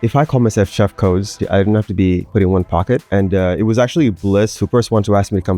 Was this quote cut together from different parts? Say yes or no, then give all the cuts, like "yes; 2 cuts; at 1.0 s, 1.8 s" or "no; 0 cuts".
yes; 4 cuts; at 1.4 s, 2.3 s, 3.0 s, 4.6 s